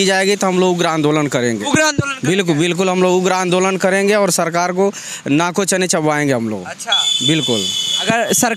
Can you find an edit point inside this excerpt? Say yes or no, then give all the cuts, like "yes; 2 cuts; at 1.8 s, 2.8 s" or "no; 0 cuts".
no; 0 cuts